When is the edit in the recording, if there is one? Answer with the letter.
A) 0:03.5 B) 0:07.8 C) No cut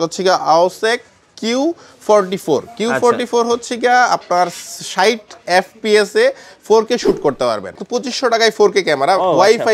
B